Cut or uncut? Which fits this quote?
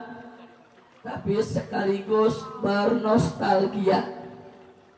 uncut